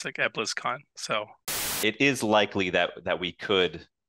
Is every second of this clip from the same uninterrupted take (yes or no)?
no